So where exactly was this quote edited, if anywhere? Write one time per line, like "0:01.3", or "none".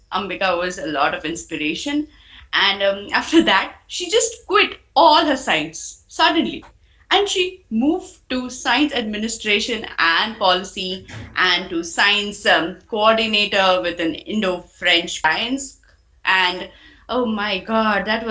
0:15.2